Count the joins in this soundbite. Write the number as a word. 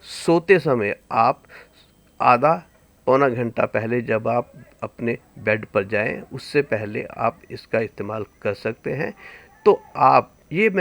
zero